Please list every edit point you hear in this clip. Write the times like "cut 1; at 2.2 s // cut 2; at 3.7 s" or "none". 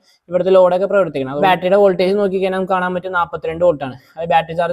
cut 1; at 1.3 s